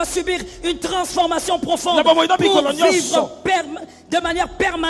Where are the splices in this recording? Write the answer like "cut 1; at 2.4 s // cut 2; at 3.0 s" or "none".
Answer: none